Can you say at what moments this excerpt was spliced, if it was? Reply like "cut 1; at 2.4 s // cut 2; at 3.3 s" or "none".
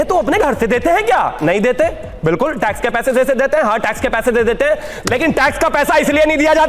none

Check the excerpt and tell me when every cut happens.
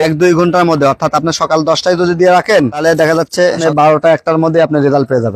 cut 1; at 3.6 s

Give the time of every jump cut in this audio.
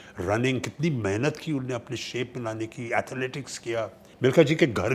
cut 1; at 4.0 s

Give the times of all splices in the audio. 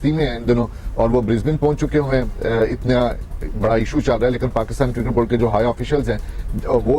none

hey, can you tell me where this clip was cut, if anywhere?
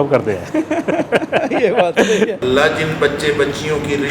cut 1; at 2.3 s

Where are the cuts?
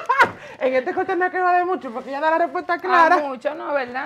none

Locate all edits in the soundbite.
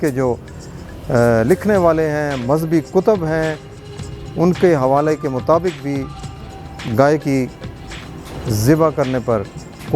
cut 1; at 6.5 s

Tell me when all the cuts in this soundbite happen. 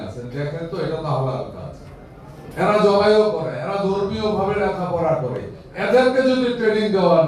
cut 1; at 2.4 s

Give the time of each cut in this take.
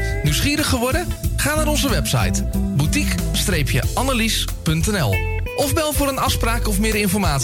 none

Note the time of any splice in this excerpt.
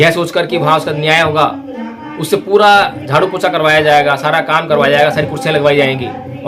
none

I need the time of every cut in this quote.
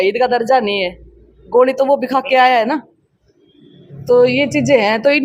none

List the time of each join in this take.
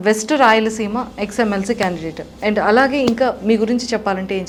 none

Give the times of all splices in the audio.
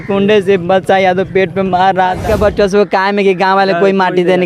cut 1; at 2.2 s

